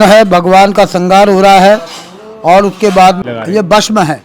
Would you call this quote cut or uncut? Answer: cut